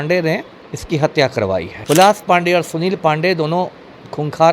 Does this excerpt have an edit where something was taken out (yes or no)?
yes